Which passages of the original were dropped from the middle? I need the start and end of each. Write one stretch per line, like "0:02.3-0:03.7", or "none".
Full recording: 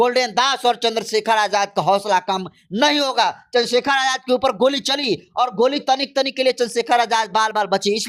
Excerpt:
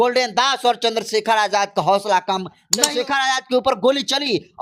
0:02.7-0:03.5